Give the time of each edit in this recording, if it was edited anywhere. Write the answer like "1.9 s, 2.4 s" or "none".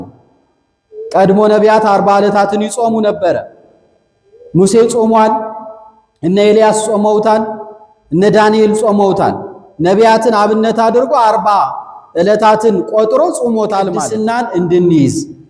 14.1 s